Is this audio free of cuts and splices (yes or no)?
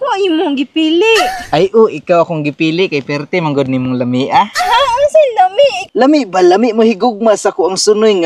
no